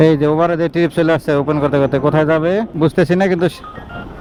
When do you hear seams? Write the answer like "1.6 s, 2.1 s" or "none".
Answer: none